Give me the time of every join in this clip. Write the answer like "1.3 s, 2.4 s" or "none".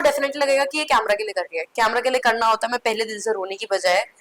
none